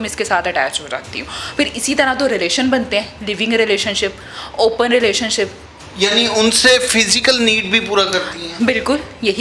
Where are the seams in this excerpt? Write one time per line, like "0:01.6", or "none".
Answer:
0:05.7